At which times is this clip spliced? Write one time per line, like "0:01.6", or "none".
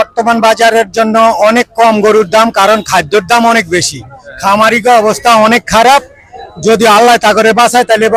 none

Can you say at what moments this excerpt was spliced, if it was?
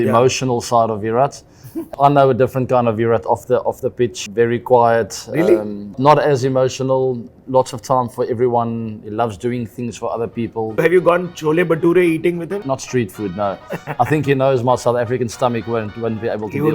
0:01.9
0:04.2
0:10.7
0:12.6

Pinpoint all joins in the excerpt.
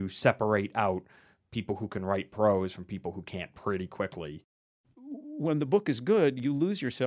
0:04.6

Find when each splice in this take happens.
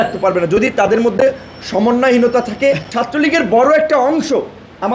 0:02.9

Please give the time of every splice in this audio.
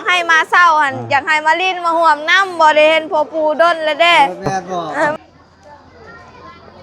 0:05.1

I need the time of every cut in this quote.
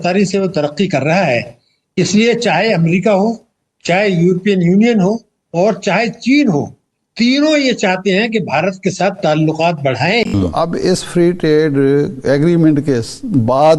0:10.3

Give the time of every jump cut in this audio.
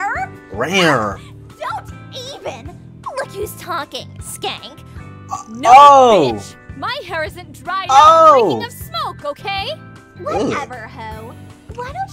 none

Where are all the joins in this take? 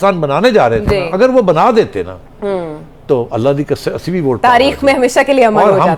none

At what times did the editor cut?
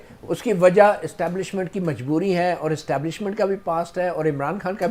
none

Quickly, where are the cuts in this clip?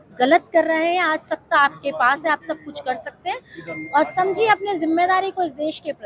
none

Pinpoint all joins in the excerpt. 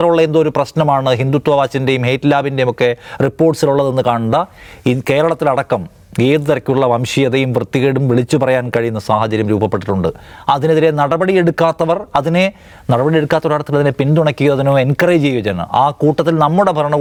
none

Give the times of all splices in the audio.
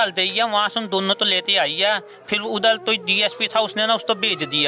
none

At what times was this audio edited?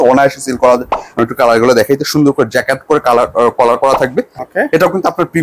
0:01.0
0:04.4

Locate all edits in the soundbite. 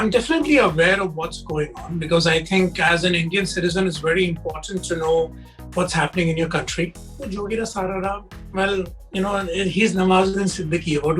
0:07.2

